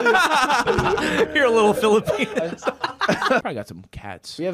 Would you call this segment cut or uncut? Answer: cut